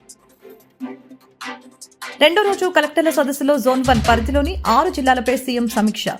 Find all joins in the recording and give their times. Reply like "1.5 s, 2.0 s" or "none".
1.0 s, 2.2 s